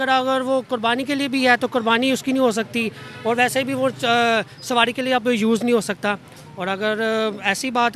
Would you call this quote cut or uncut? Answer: uncut